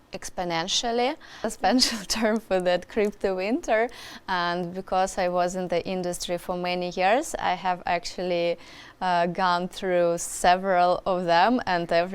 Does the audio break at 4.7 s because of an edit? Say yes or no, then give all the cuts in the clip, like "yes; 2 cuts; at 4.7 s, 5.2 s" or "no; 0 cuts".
no; 1 cut; at 1.5 s